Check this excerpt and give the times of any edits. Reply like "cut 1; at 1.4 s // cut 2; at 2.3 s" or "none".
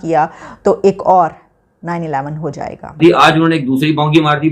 cut 1; at 3.0 s